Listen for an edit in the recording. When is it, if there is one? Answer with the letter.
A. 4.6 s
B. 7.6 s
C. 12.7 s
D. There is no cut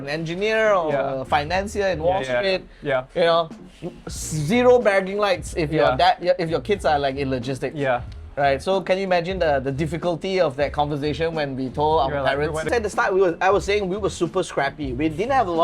C